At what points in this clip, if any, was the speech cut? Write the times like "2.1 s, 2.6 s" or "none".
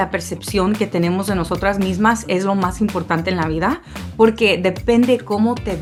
none